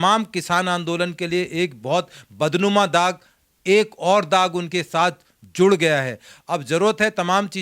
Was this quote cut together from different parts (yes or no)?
no